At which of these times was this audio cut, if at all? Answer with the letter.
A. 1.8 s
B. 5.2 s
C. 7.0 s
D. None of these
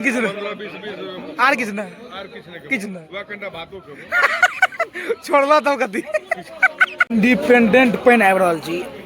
C